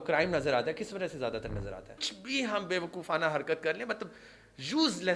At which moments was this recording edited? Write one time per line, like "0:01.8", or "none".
0:02.1